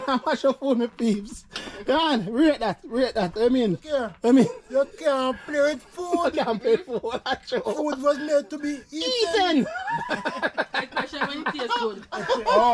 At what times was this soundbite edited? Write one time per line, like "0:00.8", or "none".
none